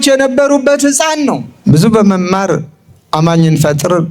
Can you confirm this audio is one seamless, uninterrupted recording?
no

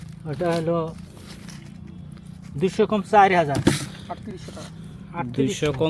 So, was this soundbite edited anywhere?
no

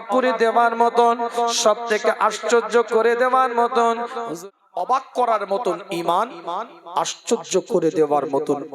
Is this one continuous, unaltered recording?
no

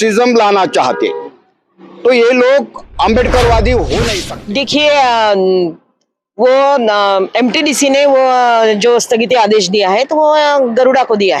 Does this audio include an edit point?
yes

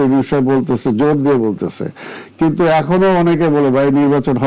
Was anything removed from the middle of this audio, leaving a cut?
no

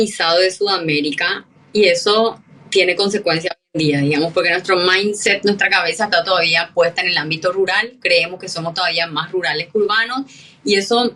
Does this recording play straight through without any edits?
yes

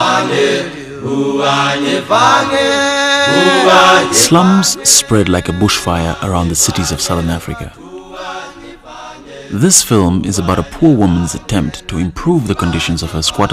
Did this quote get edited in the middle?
yes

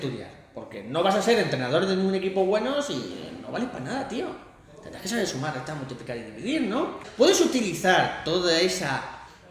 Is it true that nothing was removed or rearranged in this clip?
no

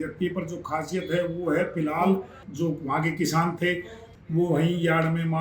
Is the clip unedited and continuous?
no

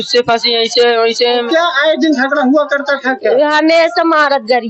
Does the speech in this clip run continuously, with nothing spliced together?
no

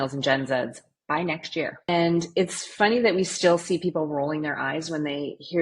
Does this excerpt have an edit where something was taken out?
yes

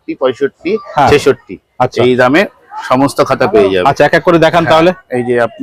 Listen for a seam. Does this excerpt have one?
no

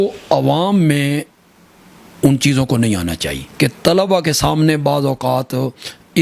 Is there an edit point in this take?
no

